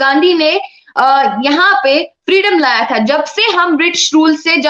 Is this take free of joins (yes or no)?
yes